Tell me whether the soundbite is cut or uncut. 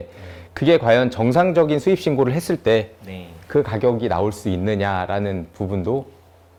uncut